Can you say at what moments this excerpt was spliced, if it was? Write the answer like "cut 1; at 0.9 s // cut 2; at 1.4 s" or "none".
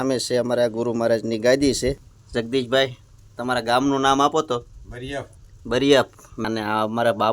cut 1; at 2.1 s // cut 2; at 6.4 s